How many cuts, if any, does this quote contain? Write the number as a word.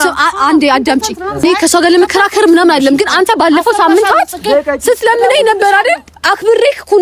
one